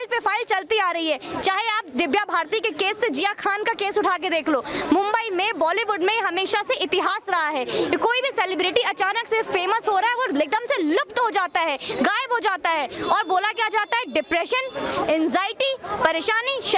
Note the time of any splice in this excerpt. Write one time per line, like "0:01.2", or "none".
none